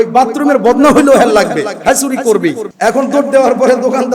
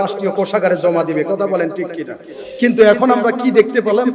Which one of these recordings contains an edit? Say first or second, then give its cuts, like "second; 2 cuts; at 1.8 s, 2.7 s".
first; 1 cut; at 2.7 s